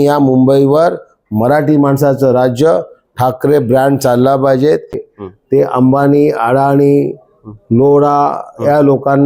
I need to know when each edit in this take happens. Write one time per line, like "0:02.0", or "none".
0:05.1